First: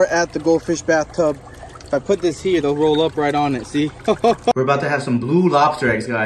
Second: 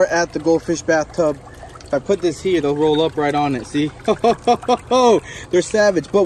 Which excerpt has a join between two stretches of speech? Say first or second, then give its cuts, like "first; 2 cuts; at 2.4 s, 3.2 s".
first; 1 cut; at 4.5 s